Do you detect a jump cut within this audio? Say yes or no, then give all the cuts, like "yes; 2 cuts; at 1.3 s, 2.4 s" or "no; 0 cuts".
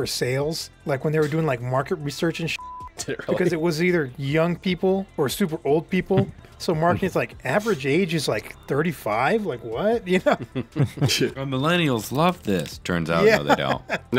no; 0 cuts